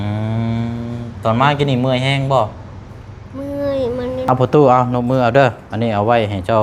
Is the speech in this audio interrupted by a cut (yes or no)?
yes